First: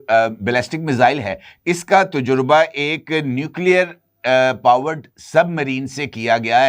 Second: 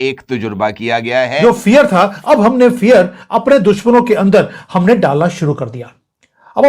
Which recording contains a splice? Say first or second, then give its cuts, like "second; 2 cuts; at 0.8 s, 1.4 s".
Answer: second; 1 cut; at 1.4 s